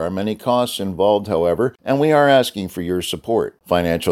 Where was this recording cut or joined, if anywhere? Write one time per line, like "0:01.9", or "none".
0:01.8